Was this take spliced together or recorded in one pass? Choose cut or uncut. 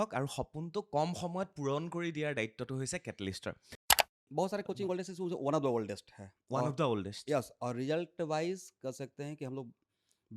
cut